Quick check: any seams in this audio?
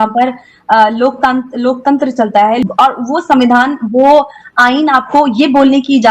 yes; 1 cut; at 2.6 s

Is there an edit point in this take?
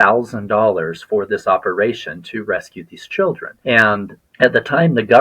yes; 2 cuts; at 3.5 s, 4.2 s

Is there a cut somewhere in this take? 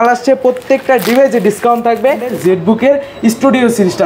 yes; 1 cut; at 2.4 s

